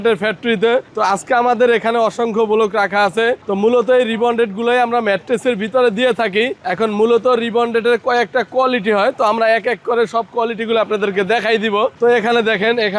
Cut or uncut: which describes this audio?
uncut